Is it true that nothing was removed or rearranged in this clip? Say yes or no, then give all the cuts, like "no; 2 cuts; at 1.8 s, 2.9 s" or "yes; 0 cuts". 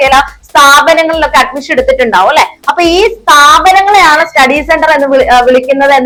yes; 0 cuts